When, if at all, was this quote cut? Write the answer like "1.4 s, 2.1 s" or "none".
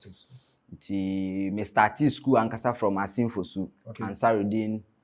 none